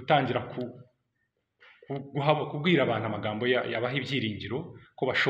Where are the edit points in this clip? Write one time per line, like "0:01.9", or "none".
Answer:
none